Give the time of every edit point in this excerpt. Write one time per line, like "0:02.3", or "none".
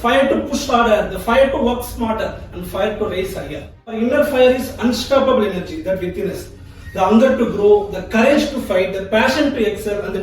0:04.0